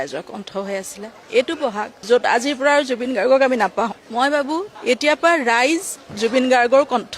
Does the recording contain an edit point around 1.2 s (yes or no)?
no